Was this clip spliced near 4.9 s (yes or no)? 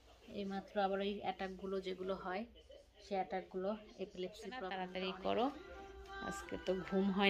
yes